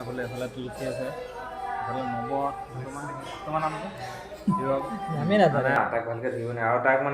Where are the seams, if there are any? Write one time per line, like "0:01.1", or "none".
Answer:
0:05.8